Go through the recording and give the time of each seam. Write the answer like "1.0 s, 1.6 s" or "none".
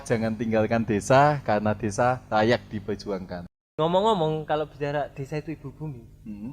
3.7 s